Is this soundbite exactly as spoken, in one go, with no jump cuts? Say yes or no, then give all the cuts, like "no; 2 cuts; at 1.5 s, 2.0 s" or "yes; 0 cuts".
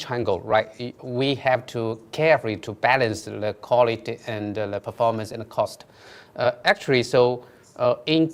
yes; 0 cuts